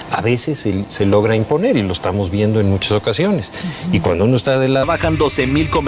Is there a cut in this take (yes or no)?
no